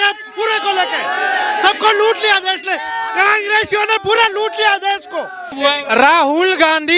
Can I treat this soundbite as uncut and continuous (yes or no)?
no